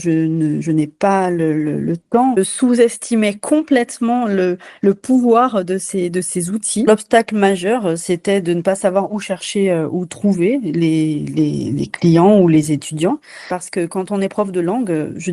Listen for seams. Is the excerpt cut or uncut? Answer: cut